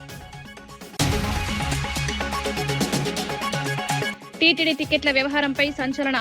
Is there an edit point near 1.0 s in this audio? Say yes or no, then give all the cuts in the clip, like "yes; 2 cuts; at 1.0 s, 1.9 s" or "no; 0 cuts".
yes; 3 cuts; at 1.0 s, 2.5 s, 4.2 s